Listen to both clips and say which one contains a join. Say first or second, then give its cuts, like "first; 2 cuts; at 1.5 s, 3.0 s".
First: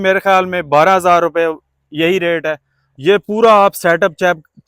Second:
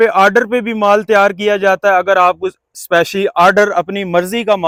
first; 1 cut; at 2.8 s